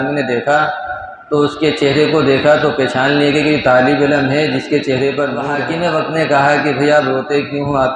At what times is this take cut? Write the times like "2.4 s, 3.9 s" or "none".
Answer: 5.5 s